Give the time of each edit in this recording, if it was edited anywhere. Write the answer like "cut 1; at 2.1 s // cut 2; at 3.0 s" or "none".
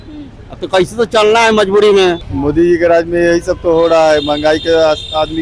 cut 1; at 2.3 s